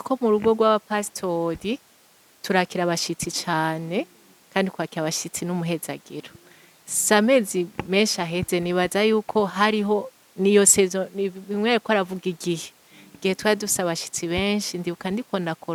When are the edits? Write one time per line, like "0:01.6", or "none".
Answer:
none